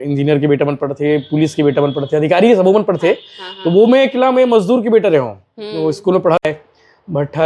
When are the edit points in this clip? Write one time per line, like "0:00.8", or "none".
0:06.4